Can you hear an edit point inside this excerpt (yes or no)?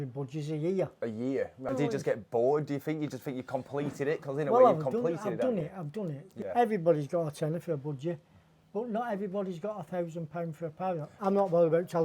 yes